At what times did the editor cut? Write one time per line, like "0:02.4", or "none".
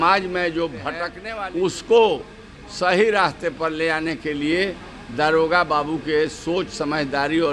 0:01.2

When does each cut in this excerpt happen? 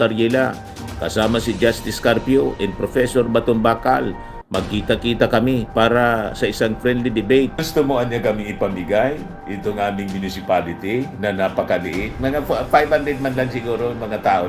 0:07.7

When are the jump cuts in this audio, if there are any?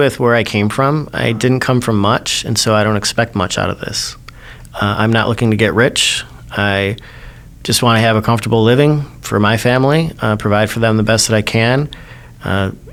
none

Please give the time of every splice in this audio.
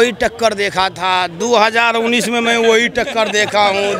none

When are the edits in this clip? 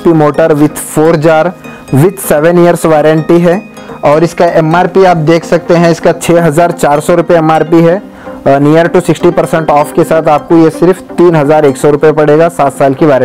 none

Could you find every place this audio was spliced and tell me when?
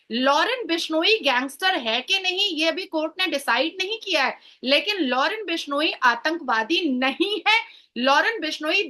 none

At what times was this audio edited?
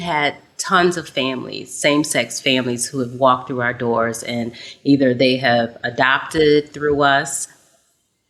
none

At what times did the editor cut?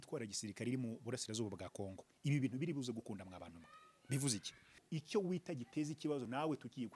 0:04.8

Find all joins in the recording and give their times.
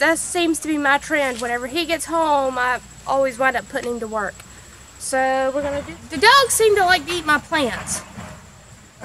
0:05.9

